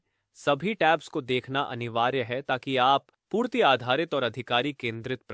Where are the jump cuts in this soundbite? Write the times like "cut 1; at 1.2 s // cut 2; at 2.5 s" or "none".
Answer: cut 1; at 3.2 s